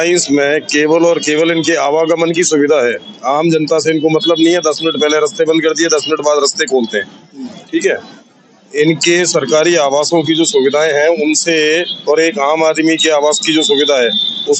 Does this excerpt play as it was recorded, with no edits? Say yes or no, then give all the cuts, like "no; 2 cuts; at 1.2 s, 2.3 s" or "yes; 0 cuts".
yes; 0 cuts